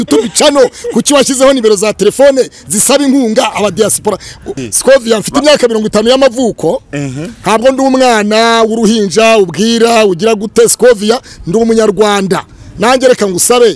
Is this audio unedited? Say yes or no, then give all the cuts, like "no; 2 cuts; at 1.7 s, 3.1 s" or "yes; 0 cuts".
no; 1 cut; at 4.7 s